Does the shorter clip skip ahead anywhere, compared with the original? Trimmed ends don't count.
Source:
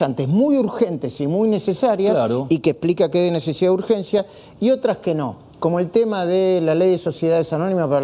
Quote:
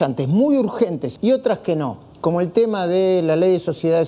yes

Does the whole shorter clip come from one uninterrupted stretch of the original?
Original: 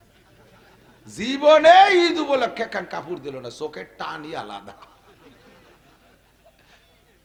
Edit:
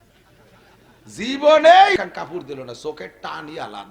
no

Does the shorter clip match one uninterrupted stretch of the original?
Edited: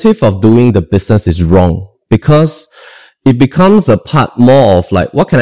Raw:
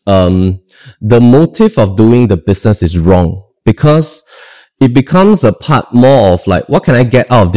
yes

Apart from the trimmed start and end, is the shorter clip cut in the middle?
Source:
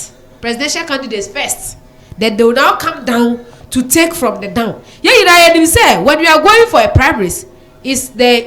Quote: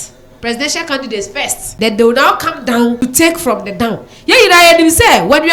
yes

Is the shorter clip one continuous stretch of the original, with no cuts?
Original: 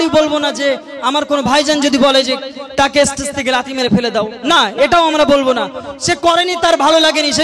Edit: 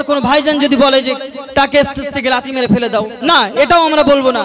yes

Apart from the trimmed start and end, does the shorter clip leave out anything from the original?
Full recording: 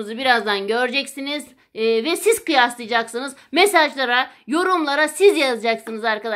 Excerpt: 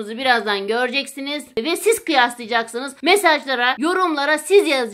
yes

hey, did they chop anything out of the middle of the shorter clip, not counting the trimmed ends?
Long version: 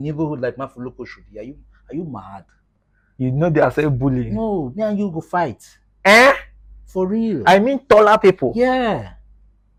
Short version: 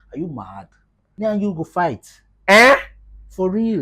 yes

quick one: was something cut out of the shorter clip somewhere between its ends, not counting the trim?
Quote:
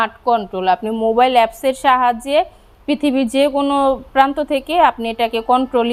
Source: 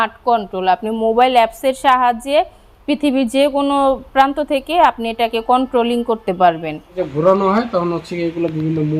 no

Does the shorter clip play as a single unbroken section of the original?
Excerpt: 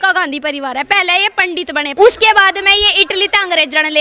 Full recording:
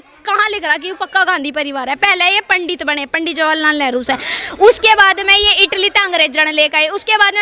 no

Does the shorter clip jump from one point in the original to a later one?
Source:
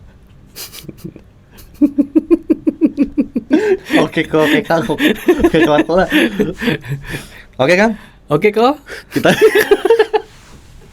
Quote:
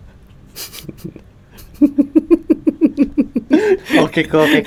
no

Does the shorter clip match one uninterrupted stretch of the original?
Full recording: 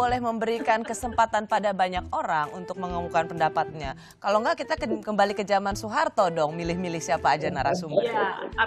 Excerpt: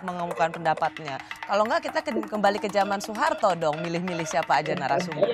yes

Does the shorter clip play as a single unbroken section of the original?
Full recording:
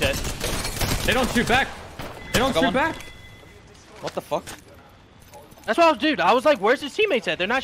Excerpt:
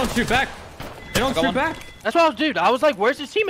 no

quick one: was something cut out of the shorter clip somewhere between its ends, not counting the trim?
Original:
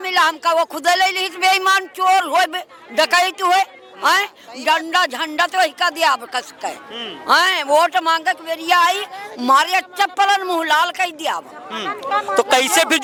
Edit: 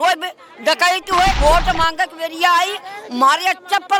yes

